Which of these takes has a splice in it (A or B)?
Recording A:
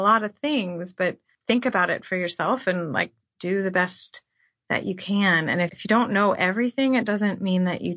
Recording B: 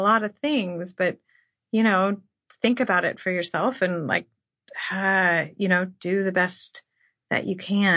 A